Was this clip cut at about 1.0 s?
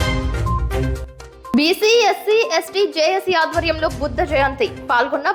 yes; 1 cut; at 1.0 s

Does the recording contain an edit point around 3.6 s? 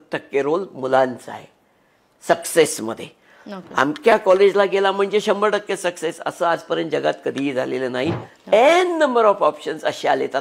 no; 1 cut; at 8.3 s

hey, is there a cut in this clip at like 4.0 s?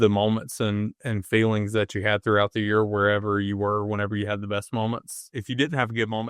no; 1 cut; at 5.4 s

